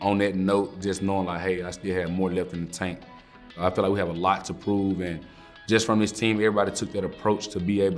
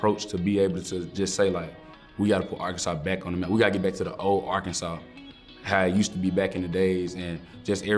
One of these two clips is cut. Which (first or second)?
first